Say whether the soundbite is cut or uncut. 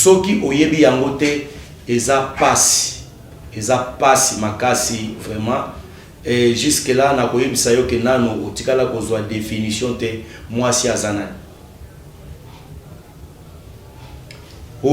uncut